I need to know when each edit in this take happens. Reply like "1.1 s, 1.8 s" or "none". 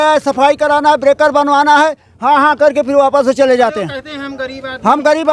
none